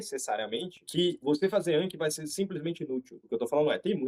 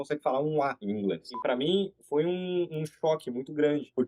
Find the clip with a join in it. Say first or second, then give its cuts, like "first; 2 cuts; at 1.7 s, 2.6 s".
second; 1 cut; at 1.3 s